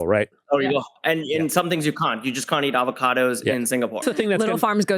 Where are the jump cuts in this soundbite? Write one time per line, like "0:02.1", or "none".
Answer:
0:04.0